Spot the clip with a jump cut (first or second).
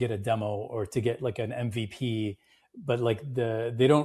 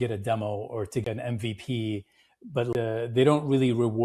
second